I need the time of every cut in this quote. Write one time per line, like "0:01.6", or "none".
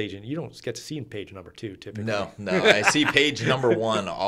none